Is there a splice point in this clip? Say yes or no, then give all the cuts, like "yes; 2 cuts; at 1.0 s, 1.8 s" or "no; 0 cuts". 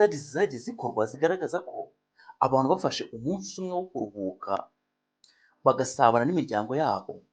no; 0 cuts